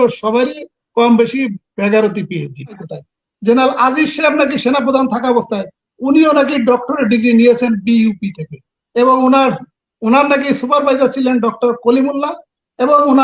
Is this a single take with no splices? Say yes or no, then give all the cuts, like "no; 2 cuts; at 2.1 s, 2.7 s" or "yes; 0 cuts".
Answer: no; 1 cut; at 2.9 s